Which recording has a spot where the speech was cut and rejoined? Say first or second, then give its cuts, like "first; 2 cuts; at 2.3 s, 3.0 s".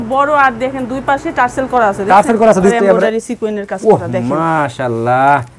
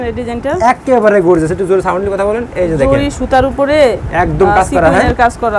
first; 1 cut; at 2.7 s